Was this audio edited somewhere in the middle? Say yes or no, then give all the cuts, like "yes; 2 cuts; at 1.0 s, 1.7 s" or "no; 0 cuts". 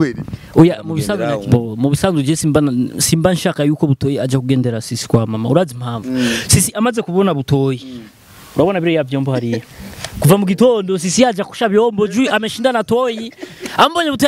yes; 1 cut; at 1.2 s